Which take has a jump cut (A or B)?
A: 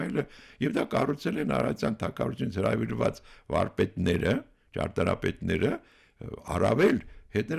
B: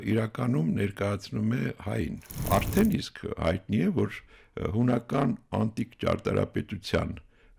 B